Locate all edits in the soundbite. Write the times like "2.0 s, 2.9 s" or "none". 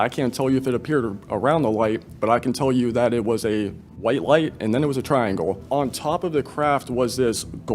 3.8 s, 5.6 s